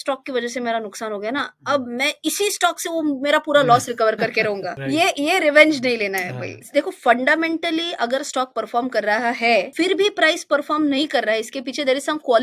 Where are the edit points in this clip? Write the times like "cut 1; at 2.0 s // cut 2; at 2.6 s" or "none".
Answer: cut 1; at 4.7 s // cut 2; at 6.6 s // cut 3; at 9.7 s